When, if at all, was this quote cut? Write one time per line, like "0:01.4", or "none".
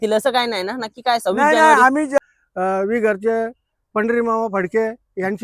0:02.2